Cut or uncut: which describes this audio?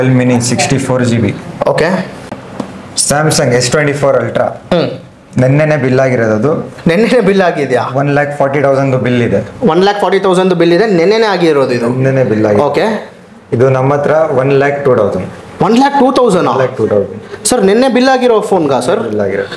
cut